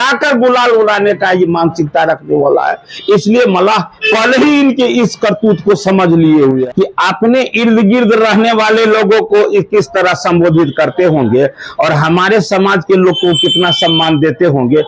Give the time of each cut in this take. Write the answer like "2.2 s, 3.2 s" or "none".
6.6 s